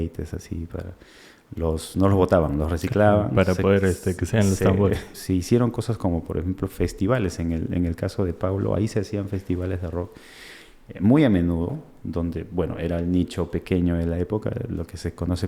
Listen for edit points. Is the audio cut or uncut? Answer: cut